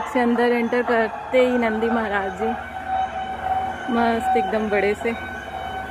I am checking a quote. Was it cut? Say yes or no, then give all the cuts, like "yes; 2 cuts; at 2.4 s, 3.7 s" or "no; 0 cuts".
no; 0 cuts